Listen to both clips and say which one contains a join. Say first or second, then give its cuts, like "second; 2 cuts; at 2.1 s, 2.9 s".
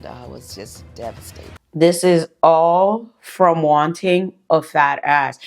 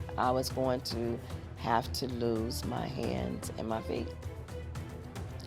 first; 1 cut; at 1.6 s